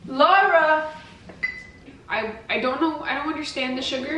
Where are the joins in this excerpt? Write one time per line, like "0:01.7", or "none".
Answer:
0:01.7